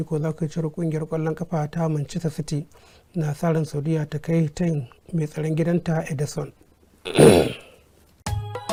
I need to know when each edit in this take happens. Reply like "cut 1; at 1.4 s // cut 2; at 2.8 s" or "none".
none